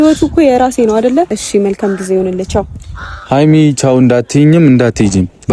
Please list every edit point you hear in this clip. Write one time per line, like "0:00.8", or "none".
0:01.3